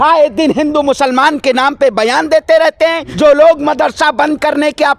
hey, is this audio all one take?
no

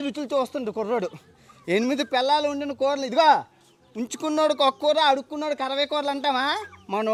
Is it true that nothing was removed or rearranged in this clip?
yes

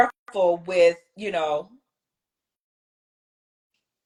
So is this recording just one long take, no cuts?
yes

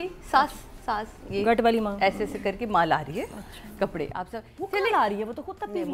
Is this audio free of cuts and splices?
yes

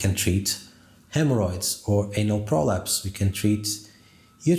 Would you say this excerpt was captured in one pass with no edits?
yes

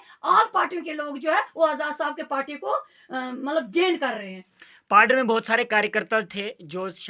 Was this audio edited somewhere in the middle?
no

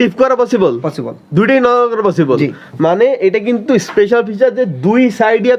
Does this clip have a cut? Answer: no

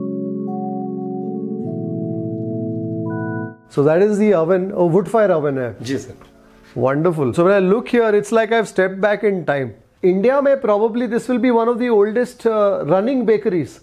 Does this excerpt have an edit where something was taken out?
yes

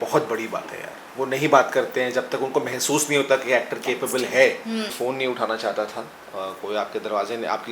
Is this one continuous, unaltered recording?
no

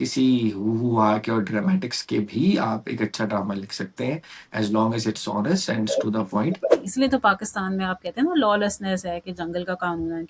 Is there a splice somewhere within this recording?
yes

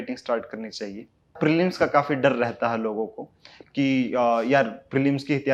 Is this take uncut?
no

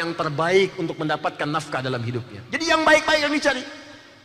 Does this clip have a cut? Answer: no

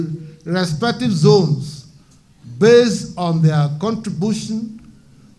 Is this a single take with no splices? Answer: yes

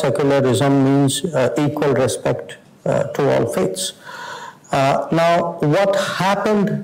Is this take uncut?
yes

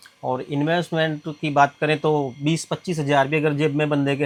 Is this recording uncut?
yes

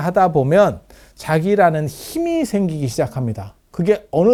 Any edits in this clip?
no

